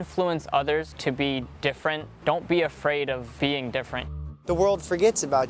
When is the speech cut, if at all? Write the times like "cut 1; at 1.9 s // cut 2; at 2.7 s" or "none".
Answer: cut 1; at 0.9 s // cut 2; at 2.1 s // cut 3; at 3.3 s // cut 4; at 4.1 s

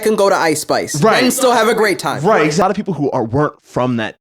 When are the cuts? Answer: cut 1; at 2.6 s

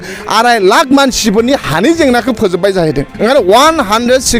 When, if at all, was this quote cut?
cut 1; at 3.1 s

